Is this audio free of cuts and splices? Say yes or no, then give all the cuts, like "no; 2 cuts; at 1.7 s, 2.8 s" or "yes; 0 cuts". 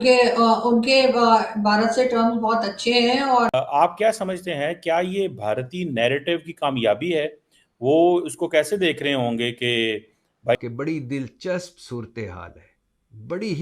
no; 2 cuts; at 3.5 s, 10.6 s